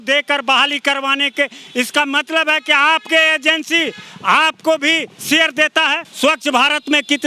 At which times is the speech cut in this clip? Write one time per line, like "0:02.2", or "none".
0:06.1